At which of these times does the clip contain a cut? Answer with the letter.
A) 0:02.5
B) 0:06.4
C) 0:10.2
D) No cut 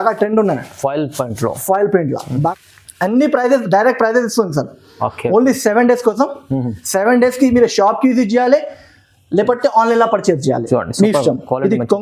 A